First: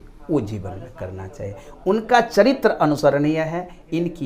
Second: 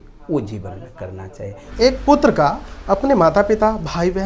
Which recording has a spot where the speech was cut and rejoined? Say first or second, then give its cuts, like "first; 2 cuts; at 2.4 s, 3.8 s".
second; 1 cut; at 1.7 s